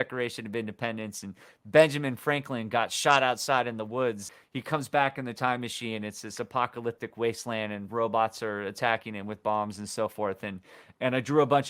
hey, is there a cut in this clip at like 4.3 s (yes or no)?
yes